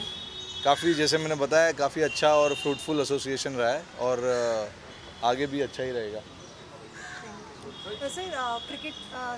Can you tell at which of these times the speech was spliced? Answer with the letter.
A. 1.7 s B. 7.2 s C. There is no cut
C